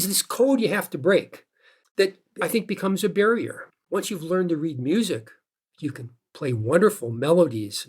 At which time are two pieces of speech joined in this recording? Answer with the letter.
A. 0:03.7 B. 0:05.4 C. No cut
A